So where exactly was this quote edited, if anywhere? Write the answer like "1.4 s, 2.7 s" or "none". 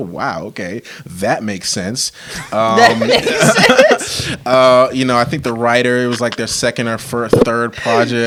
none